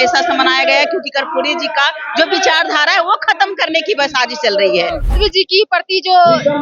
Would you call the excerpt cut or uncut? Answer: cut